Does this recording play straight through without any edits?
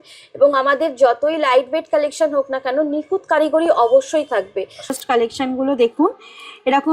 no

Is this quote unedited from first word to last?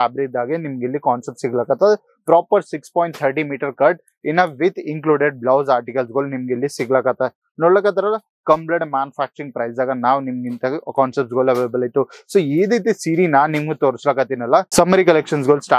no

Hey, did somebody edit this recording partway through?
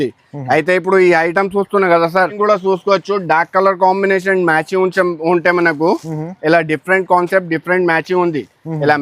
yes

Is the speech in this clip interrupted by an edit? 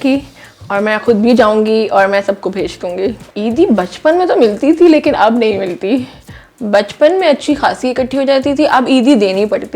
yes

